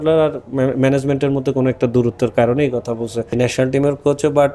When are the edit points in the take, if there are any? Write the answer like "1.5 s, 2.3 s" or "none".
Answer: 3.3 s